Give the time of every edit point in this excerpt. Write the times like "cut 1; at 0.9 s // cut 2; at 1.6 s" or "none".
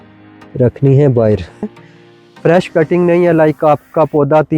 cut 1; at 1.7 s